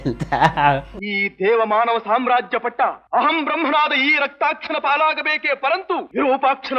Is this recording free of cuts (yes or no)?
no